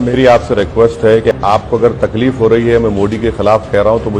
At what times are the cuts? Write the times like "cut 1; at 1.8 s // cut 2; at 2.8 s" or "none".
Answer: cut 1; at 1.3 s